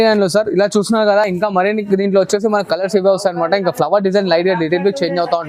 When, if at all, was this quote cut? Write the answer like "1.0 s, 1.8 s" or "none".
none